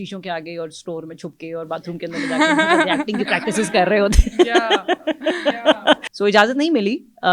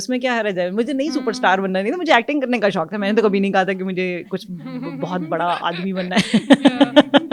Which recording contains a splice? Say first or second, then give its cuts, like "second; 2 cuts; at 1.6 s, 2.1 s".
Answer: first; 1 cut; at 6.1 s